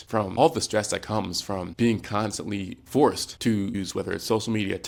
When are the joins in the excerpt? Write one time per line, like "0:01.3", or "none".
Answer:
none

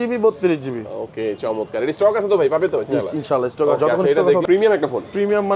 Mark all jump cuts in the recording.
0:04.4

